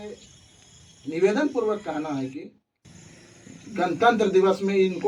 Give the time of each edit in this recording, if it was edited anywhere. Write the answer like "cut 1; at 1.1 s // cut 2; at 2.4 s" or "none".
none